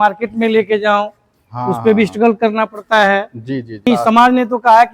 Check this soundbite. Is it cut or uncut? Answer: cut